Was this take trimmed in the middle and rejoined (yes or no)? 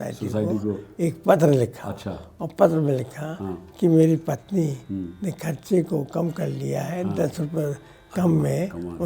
no